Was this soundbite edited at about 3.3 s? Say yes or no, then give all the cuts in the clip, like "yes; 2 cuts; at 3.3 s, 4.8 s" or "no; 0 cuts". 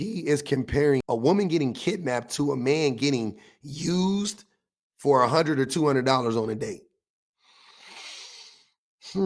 no; 1 cut; at 1.0 s